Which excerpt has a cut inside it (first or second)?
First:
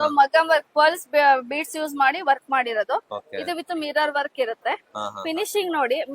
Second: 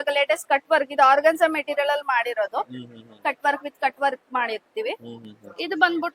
first